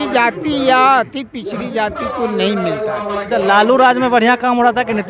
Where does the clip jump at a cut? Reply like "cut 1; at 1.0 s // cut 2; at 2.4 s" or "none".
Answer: cut 1; at 3.3 s